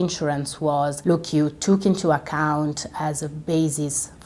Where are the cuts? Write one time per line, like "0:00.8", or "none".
0:01.0

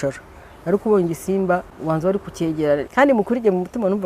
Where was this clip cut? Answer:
0:01.7
0:02.9

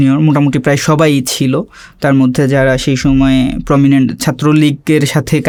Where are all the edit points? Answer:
none

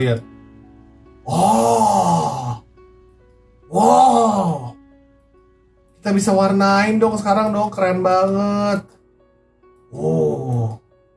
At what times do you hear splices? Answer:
none

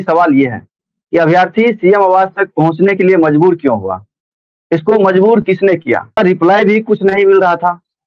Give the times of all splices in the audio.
0:06.2

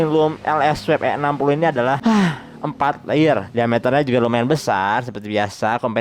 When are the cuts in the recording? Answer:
none

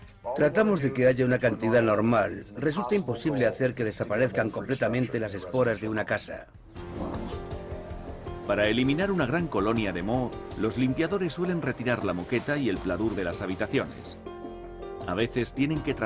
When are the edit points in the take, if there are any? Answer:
0:02.9

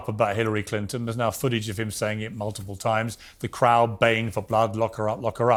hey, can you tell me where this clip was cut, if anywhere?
none

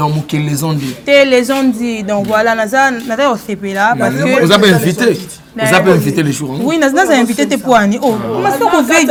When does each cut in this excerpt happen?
none

